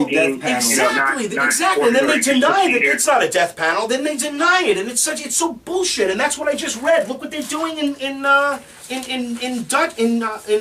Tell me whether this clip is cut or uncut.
uncut